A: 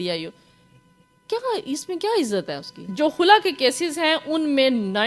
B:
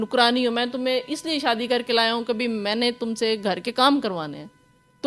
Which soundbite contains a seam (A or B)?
A